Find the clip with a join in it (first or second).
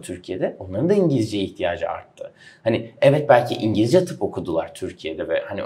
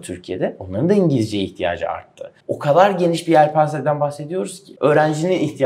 second